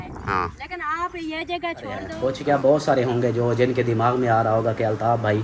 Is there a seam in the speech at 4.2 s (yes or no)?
no